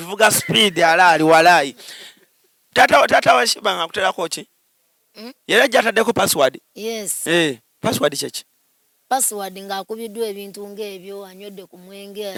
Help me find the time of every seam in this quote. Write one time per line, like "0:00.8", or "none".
none

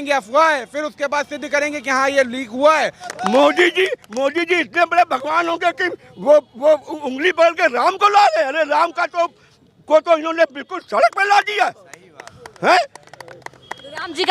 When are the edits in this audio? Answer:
0:03.1

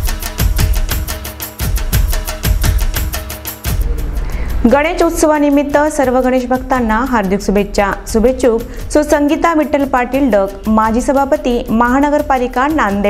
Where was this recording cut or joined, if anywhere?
0:03.8

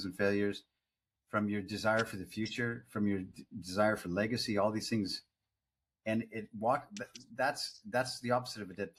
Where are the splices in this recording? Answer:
none

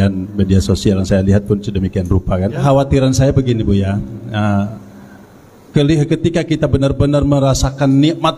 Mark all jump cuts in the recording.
0:02.6

